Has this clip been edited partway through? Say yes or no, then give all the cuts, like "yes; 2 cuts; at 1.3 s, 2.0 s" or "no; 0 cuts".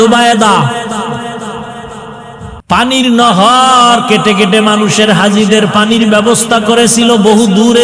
yes; 1 cut; at 2.5 s